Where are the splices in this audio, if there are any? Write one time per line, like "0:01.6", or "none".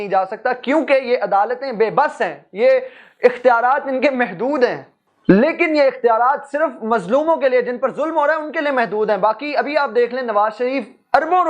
none